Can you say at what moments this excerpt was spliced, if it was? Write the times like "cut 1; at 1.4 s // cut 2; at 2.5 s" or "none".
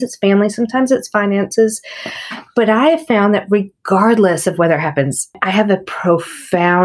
cut 1; at 5.4 s